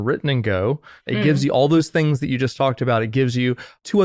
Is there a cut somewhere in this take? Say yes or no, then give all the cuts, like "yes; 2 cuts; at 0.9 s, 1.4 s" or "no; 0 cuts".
no; 0 cuts